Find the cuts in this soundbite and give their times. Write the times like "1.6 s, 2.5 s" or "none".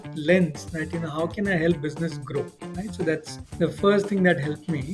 3.4 s